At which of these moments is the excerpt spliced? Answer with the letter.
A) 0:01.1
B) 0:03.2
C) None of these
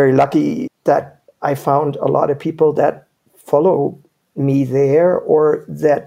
C